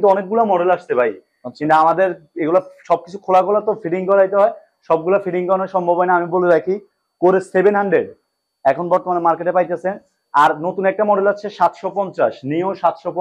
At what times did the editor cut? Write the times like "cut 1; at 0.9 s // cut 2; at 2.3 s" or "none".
none